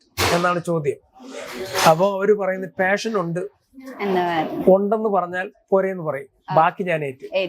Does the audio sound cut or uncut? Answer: uncut